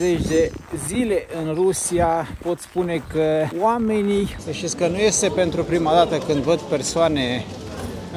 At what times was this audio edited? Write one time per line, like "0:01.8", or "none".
0:03.5
0:04.4